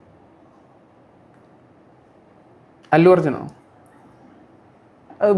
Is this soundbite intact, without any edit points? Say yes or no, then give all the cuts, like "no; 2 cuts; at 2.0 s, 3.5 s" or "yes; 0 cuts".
no; 1 cut; at 2.1 s